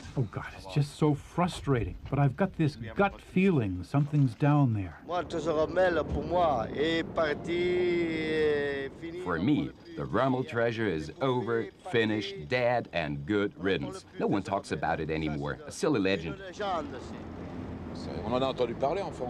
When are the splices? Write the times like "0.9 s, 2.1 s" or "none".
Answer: 17.6 s